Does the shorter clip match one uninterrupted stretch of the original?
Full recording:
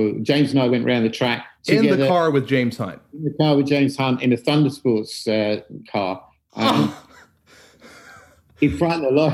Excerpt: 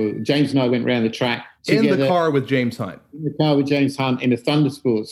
yes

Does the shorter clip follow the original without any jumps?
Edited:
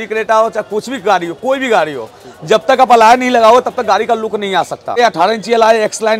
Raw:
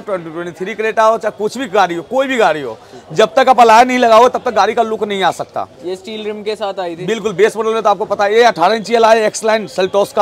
no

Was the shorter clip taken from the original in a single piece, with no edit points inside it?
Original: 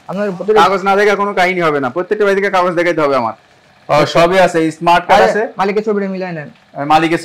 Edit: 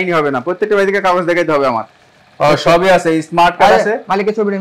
yes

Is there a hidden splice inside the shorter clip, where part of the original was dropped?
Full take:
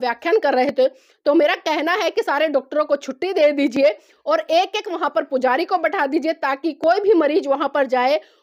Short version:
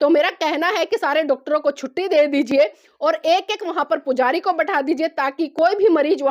no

